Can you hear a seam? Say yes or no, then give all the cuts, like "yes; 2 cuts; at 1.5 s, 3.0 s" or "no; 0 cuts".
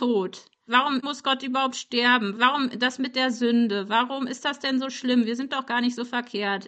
yes; 1 cut; at 1.0 s